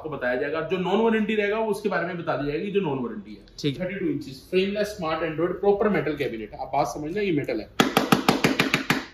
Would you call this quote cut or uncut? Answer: cut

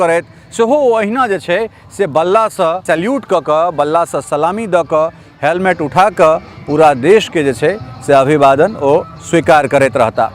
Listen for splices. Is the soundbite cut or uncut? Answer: cut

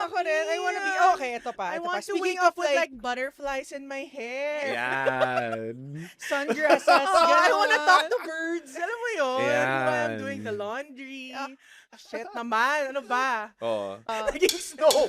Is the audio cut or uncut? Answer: cut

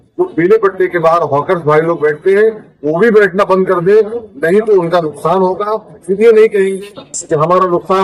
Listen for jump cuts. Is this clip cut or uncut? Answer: uncut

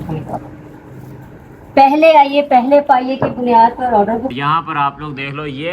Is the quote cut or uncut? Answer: cut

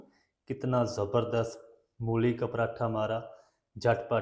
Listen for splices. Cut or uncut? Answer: uncut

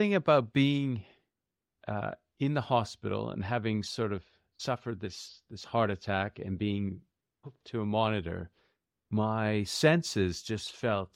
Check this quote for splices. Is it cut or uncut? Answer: uncut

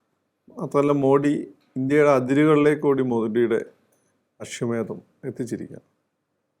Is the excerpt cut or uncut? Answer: uncut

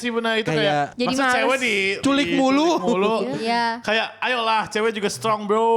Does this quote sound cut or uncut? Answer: cut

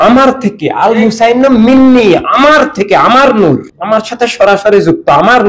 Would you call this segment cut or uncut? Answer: cut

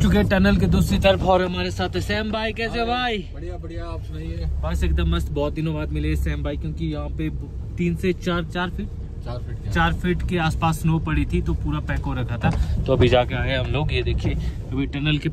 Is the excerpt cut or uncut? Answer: uncut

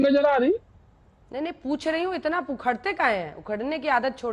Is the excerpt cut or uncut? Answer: uncut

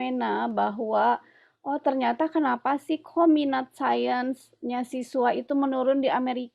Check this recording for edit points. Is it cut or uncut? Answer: uncut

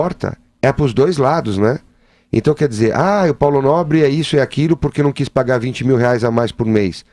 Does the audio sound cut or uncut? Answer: cut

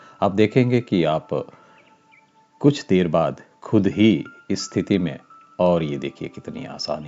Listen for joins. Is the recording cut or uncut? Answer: uncut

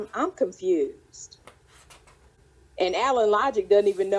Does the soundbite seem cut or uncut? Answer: uncut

